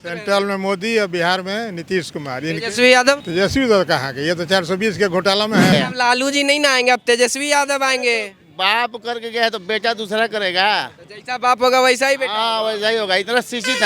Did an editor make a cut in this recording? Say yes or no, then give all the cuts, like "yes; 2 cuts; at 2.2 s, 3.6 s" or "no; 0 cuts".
yes; 2 cuts; at 3.2 s, 5.7 s